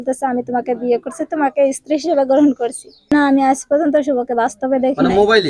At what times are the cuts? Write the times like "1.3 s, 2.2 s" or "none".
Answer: none